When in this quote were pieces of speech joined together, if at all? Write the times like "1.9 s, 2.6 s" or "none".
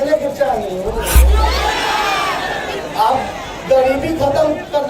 1.2 s